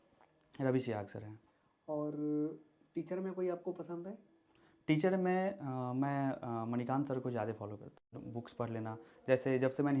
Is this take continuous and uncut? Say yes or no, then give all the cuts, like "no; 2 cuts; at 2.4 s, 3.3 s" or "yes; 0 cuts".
no; 1 cut; at 8.1 s